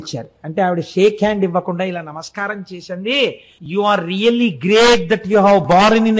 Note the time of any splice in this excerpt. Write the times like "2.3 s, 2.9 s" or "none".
3.5 s